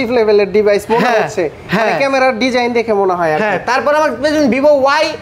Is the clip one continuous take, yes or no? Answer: yes